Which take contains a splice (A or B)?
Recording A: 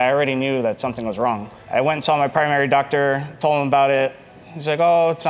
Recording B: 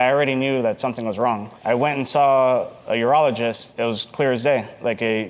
B